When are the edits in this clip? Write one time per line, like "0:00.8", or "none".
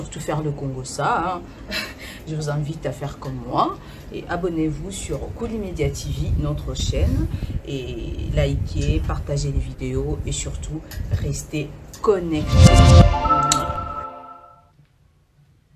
0:12.4